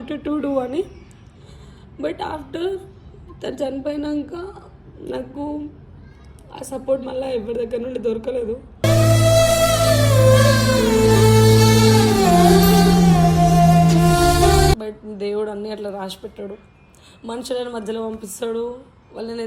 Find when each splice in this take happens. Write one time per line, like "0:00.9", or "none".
0:14.9

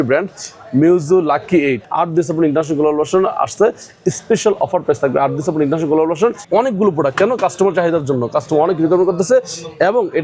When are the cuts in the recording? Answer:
0:01.8
0:06.4

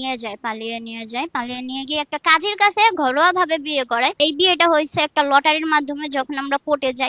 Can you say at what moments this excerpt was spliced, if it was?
0:04.2

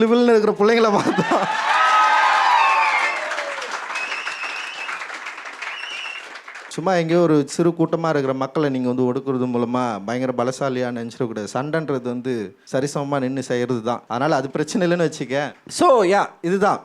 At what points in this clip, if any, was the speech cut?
0:06.7
0:12.6
0:14.0
0:15.6

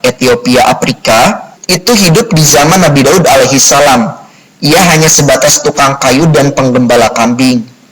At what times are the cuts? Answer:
0:01.5

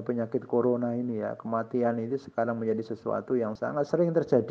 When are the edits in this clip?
0:03.5

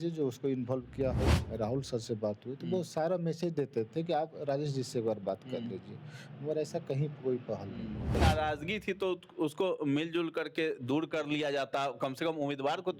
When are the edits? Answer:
0:01.4
0:08.1

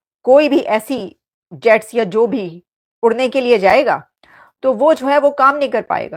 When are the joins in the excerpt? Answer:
none

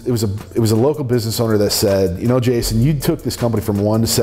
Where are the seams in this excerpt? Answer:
none

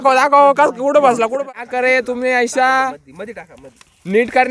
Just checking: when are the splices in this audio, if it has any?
0:01.4

